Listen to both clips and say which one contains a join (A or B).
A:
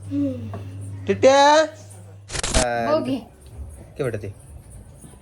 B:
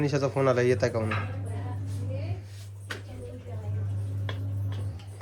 A